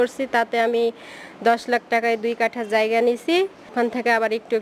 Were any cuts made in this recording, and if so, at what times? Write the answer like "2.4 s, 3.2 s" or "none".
3.7 s